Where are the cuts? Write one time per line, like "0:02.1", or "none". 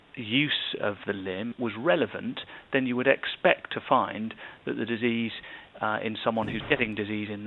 0:01.5